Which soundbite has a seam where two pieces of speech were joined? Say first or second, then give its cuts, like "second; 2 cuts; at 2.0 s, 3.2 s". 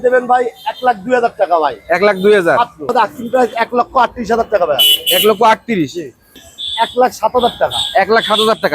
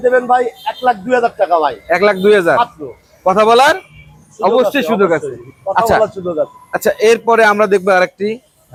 first; 2 cuts; at 2.9 s, 6.3 s